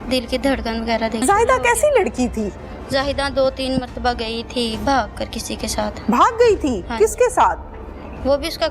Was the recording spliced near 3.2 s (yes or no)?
no